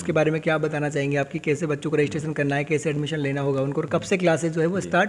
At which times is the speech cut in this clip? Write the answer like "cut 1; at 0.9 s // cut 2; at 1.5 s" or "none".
none